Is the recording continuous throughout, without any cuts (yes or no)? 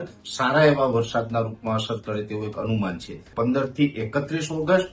no